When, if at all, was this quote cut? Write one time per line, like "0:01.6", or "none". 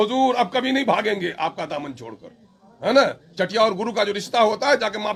none